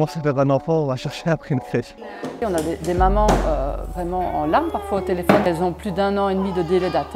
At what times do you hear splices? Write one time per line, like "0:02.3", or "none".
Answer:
0:02.3
0:05.5

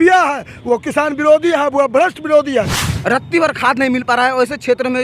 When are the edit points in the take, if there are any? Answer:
0:02.8

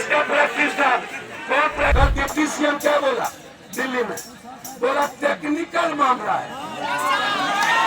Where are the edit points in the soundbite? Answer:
0:01.9

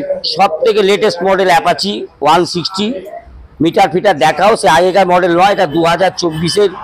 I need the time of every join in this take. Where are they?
none

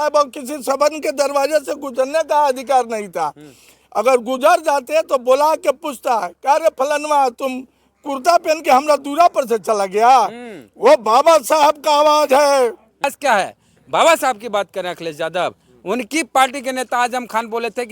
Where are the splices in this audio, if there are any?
0:13.1

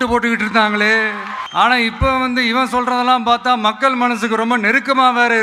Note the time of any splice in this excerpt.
0:01.3

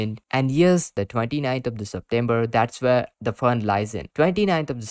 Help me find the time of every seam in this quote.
0:01.0

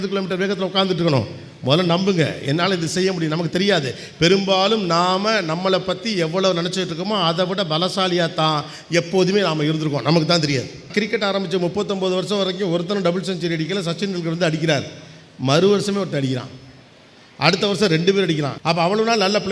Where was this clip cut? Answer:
0:10.9
0:18.5

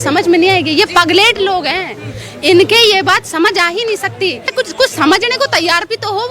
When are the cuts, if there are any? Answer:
0:04.5

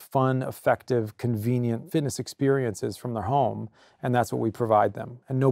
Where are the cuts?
0:01.8

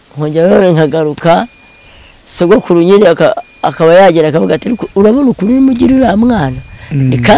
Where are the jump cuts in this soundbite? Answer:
none

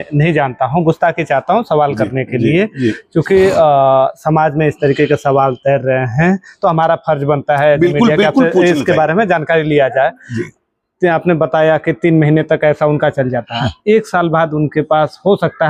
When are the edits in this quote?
none

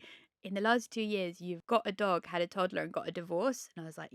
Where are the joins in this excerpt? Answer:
0:01.5

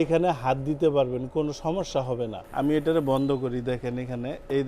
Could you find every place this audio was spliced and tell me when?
0:02.4

